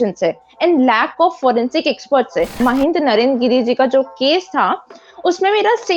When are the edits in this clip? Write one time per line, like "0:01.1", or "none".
0:02.6